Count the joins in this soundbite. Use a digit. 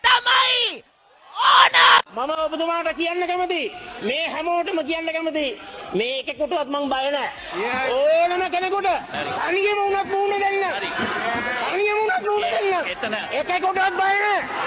1